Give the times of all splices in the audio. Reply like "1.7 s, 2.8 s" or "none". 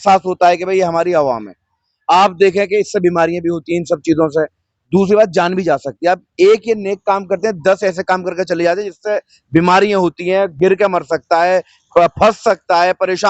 none